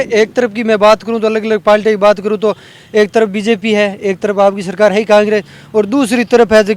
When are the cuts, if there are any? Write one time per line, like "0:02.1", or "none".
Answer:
none